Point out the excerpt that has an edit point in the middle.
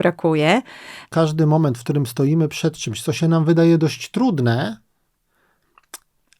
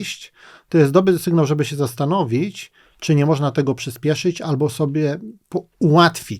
first; 1 cut; at 1.1 s

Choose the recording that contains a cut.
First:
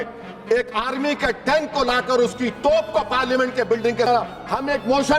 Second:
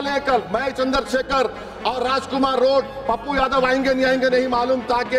first; 1 cut; at 4.1 s

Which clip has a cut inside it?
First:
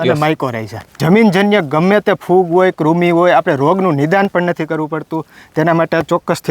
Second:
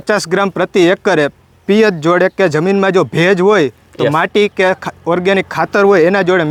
first; 1 cut; at 1.0 s

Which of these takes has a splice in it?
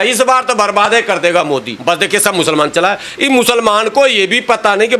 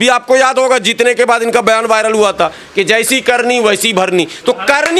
first; 1 cut; at 1.7 s

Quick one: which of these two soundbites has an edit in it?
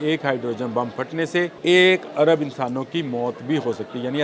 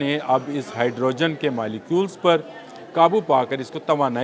first; 1 cut; at 1.6 s

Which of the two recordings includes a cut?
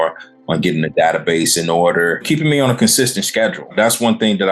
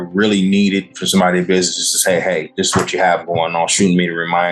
first; 2 cuts; at 2.2 s, 3.7 s

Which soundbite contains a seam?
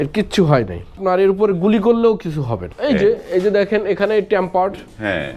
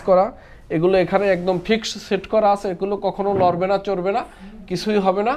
first; 2 cuts; at 1.0 s, 2.6 s

